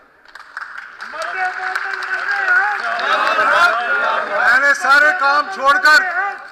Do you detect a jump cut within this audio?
no; 0 cuts

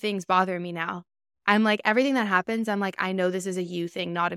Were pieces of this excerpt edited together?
no; 0 cuts

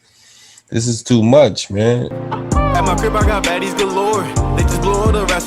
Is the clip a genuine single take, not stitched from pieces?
no; 1 cut; at 2.1 s

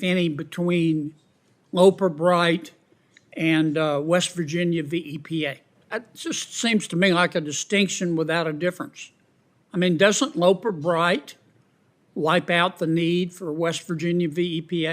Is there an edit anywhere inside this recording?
yes; 1 cut; at 5.8 s

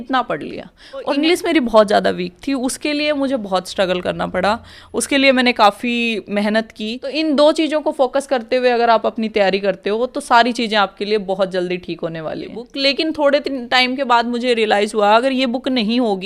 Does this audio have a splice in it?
yes; 3 cuts; at 1.1 s, 7.1 s, 12.7 s

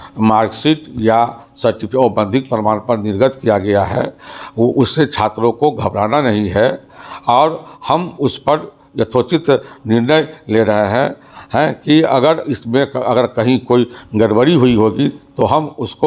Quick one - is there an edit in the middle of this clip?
no; 0 cuts

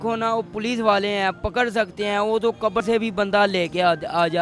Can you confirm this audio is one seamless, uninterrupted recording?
no; 1 cut; at 2.8 s

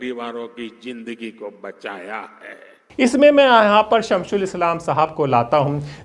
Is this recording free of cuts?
yes; 0 cuts

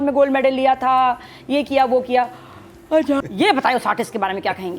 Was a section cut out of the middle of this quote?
yes; 1 cut; at 3.2 s

